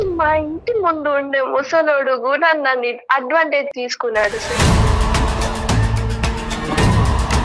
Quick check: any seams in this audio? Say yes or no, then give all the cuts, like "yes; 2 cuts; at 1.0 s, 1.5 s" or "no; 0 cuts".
yes; 1 cut; at 3.7 s